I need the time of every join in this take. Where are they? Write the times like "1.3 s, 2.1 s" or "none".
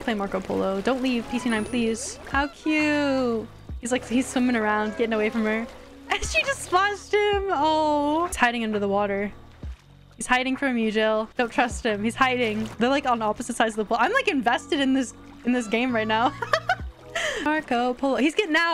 2.3 s, 8.3 s, 12.7 s, 17.4 s